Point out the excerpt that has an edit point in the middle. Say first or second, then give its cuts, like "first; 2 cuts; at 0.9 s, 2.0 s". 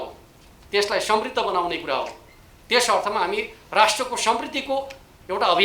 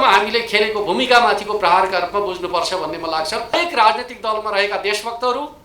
second; 1 cut; at 3.5 s